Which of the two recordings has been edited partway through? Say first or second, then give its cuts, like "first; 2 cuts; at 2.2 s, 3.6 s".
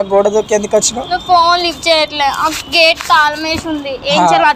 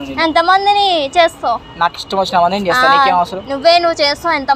second; 1 cut; at 1.0 s